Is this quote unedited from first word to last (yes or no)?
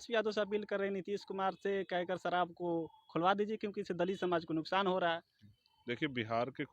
yes